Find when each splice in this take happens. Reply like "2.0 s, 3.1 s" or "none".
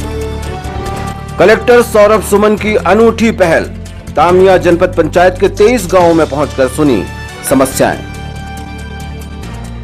0.9 s